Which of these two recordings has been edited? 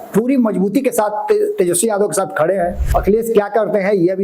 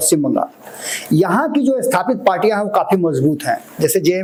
first; 1 cut; at 2.8 s

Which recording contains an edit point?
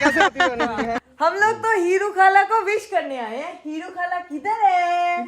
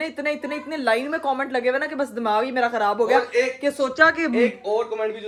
first; 1 cut; at 1.1 s

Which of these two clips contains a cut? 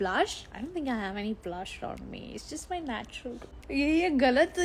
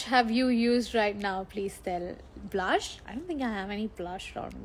first; 1 cut; at 3.5 s

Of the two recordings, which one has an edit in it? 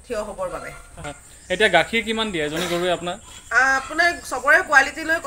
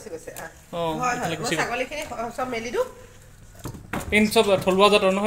first; 1 cut; at 1.1 s

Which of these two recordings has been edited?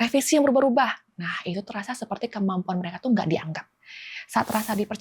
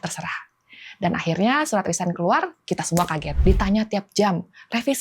second; 1 cut; at 3.3 s

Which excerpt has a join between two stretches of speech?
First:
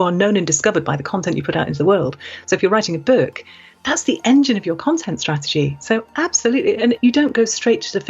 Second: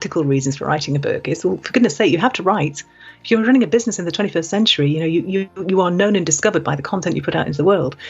first; 1 cut; at 7.0 s

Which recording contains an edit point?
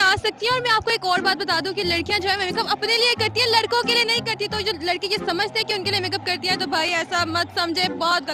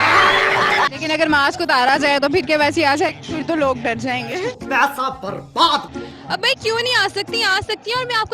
second; 2 cuts; at 1.0 s, 5.9 s

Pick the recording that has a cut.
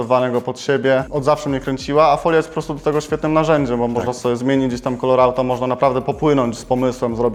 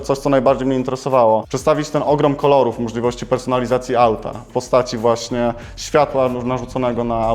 second; 1 cut; at 1.5 s

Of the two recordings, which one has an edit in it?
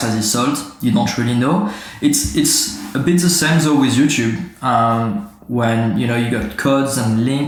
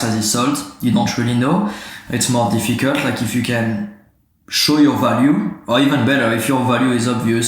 second; 1 cut; at 1.8 s

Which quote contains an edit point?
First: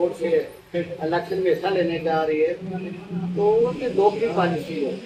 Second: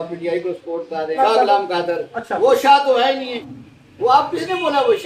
second; 2 cuts; at 1.2 s, 3.4 s

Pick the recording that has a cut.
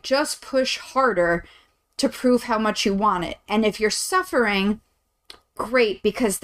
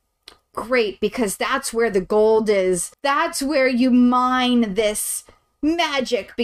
second; 1 cut; at 2.9 s

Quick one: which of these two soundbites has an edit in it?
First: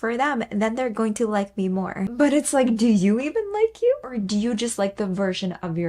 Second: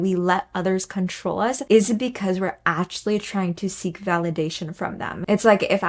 second; 1 cut; at 1.6 s

